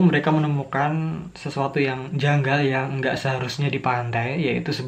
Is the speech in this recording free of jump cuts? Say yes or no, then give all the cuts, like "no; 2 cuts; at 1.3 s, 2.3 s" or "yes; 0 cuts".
yes; 0 cuts